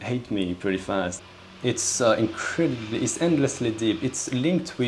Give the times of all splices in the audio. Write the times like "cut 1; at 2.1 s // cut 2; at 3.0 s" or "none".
cut 1; at 1.2 s